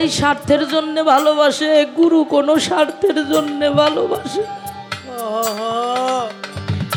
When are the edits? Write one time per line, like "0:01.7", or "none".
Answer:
none